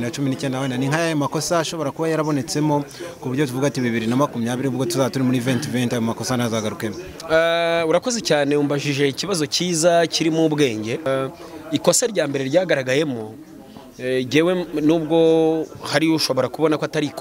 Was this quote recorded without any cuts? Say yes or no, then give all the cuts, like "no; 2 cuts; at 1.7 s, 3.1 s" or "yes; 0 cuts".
no; 1 cut; at 11.1 s